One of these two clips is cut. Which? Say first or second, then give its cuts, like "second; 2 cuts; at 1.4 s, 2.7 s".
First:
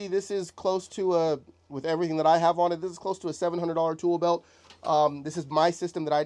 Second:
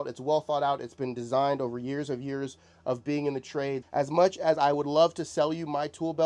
second; 1 cut; at 3.8 s